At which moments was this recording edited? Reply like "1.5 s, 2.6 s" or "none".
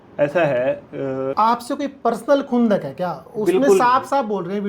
1.3 s